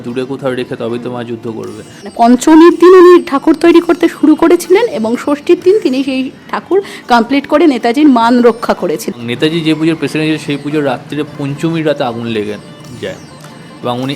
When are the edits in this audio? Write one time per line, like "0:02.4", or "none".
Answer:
0:02.1
0:09.2